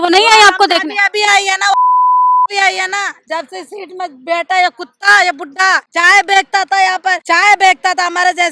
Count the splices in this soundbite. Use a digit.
2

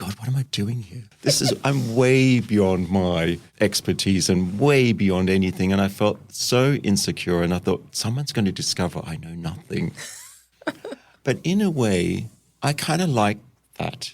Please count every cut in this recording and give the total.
1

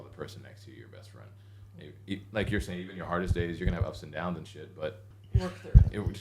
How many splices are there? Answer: 1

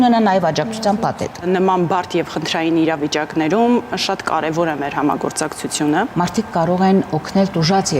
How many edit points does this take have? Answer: 2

